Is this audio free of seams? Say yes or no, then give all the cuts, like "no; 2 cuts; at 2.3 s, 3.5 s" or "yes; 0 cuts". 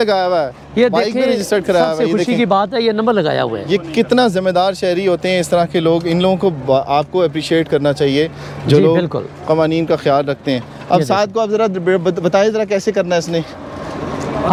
yes; 0 cuts